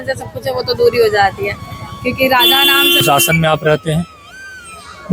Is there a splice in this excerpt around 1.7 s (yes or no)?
no